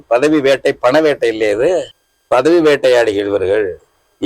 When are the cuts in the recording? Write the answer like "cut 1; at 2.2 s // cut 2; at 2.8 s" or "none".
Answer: cut 1; at 1.9 s